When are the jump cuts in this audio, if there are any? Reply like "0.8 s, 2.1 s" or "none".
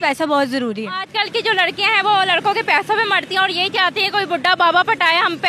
1.1 s